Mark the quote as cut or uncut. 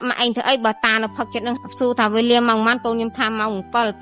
cut